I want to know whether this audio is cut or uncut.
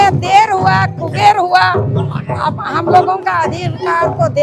uncut